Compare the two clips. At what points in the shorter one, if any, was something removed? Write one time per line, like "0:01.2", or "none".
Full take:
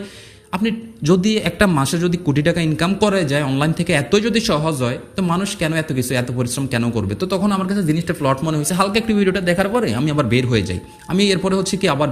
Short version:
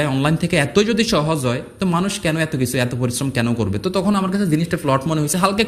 none